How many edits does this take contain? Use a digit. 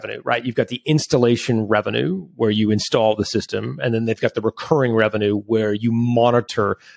0